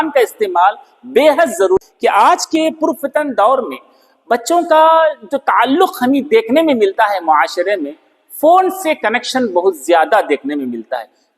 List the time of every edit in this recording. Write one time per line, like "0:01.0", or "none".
0:01.8